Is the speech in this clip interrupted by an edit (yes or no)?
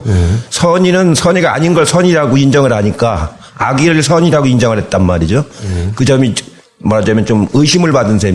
no